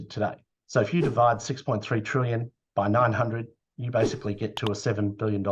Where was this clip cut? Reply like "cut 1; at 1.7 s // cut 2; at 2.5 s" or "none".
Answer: none